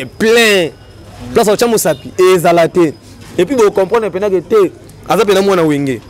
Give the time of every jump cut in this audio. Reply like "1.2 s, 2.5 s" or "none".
none